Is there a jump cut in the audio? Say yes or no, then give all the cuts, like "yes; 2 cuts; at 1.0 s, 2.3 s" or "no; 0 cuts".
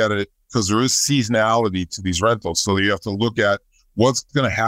no; 0 cuts